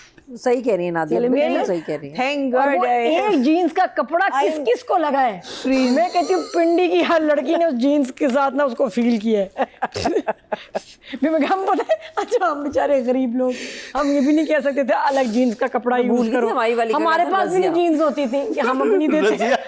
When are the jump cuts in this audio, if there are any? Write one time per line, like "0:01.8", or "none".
none